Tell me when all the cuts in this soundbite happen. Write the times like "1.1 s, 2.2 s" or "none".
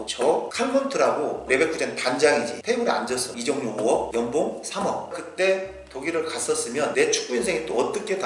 5.1 s